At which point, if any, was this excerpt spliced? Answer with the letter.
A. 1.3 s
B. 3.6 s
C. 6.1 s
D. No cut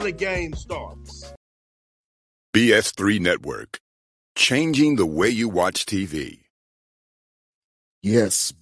A